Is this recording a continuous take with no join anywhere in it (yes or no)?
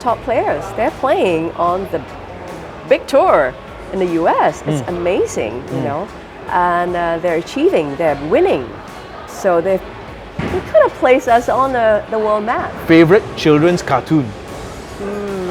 no